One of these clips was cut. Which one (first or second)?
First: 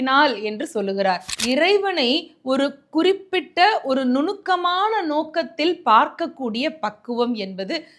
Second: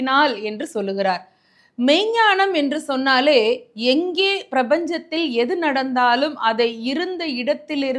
first